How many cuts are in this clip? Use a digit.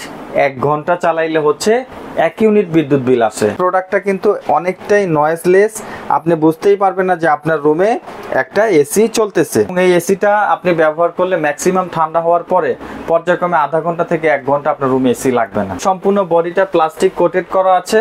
3